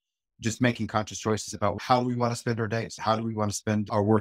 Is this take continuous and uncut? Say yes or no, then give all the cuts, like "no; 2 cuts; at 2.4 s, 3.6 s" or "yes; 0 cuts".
no; 2 cuts; at 1.8 s, 2.9 s